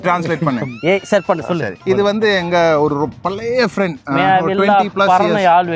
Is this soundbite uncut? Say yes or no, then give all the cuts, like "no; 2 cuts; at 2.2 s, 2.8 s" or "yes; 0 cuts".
no; 1 cut; at 1.8 s